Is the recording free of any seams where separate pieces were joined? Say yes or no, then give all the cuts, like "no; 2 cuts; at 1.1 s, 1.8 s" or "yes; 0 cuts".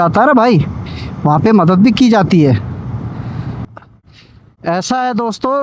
no; 1 cut; at 3.6 s